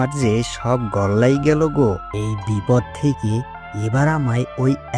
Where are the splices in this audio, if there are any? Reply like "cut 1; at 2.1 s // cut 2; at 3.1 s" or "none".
cut 1; at 2.1 s